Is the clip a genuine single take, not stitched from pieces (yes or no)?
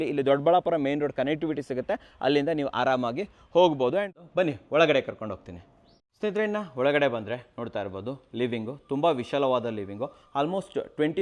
no